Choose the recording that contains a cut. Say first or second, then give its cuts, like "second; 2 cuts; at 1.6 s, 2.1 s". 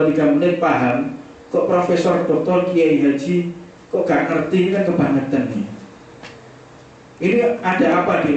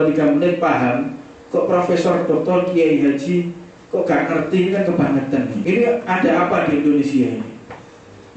second; 1 cut; at 5.6 s